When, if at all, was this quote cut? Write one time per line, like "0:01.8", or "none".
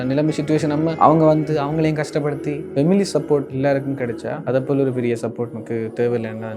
0:00.9
0:02.7
0:04.0
0:05.6

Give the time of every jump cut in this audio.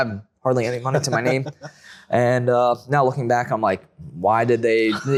none

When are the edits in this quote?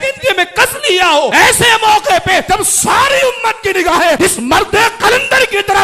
none

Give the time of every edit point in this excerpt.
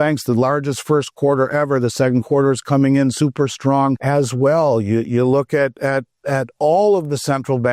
0:04.0

